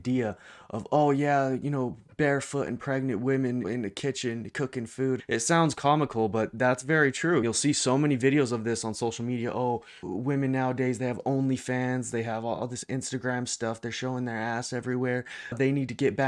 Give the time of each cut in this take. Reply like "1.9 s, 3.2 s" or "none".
3.7 s, 5.2 s, 7.4 s, 10.0 s

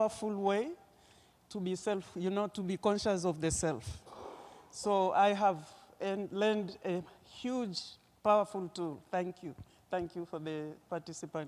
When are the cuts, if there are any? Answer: 5.6 s

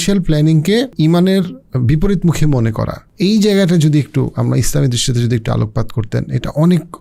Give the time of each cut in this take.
0.9 s, 3.0 s

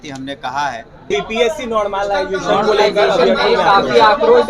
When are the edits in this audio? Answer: 1.1 s

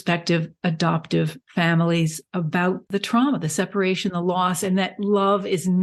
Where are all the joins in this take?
2.9 s

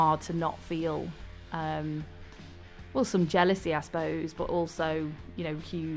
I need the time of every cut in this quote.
none

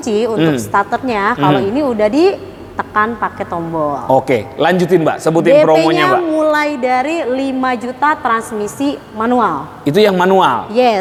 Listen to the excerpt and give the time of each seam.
none

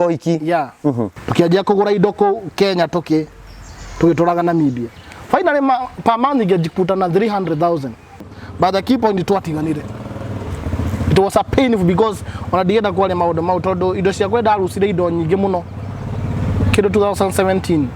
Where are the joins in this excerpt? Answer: 1.2 s, 8.2 s

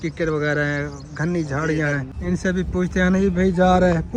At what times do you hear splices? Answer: 2.1 s

